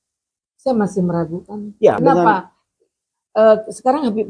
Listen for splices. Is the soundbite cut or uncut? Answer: cut